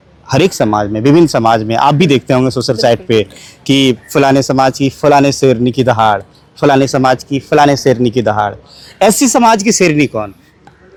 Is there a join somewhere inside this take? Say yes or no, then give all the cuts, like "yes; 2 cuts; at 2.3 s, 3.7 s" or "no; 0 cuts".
no; 0 cuts